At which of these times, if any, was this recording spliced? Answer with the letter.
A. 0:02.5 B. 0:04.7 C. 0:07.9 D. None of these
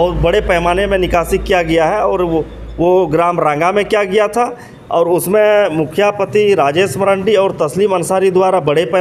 D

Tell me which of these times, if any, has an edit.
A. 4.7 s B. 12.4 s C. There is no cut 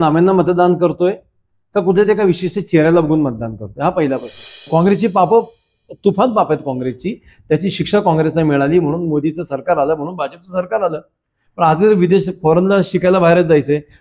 A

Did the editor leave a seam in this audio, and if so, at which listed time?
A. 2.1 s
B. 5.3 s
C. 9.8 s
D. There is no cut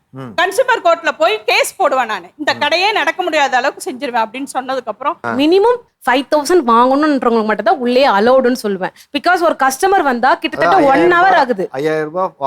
B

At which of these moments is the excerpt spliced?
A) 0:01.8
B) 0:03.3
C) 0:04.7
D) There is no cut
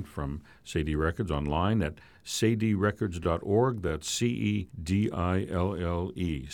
C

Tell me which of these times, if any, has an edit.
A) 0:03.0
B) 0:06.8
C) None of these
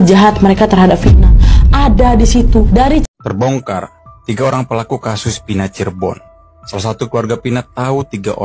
A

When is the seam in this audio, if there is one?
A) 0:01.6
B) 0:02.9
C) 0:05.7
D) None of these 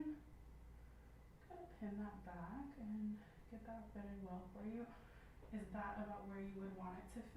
D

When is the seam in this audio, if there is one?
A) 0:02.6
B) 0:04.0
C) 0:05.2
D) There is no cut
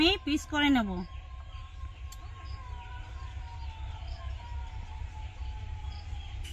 D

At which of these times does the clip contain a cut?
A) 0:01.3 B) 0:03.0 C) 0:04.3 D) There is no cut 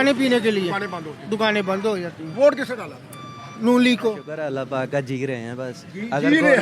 C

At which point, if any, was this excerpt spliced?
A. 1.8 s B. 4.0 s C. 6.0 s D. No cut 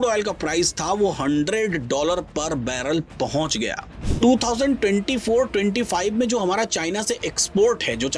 B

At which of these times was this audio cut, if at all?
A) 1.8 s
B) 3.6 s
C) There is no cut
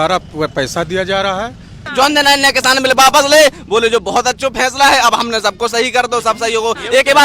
A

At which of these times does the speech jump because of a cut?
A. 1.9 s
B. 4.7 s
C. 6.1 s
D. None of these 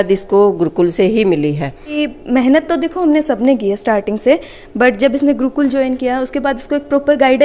A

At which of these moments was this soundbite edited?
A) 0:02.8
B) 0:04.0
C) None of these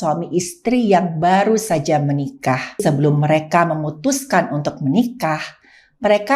A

